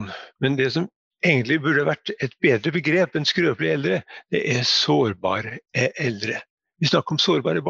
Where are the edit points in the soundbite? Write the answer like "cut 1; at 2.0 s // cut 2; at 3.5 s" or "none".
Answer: cut 1; at 1.0 s